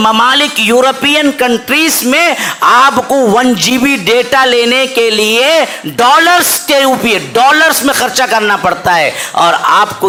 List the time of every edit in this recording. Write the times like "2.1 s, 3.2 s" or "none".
none